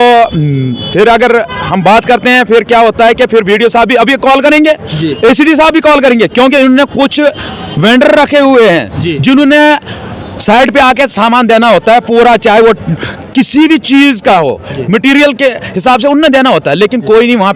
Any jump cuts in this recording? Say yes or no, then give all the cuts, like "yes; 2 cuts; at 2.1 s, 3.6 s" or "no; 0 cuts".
no; 0 cuts